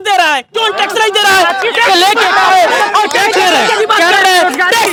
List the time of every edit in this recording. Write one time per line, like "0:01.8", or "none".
none